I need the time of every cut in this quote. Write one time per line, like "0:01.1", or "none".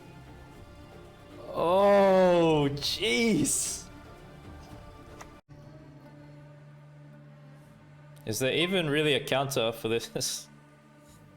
0:05.4